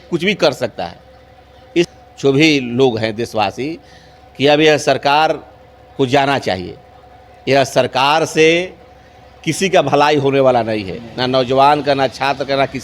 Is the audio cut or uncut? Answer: cut